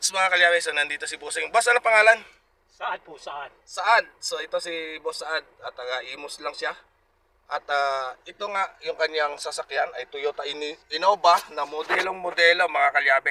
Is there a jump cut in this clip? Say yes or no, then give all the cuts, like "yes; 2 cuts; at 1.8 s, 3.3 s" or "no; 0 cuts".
no; 0 cuts